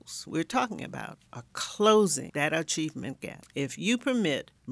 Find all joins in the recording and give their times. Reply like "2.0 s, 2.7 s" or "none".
2.2 s, 3.3 s